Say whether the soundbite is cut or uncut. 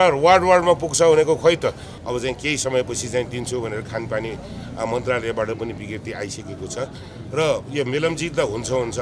cut